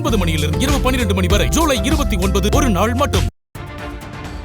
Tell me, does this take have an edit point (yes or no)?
yes